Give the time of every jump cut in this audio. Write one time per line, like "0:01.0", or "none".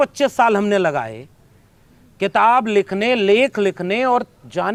none